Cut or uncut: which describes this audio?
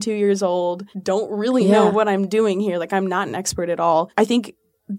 cut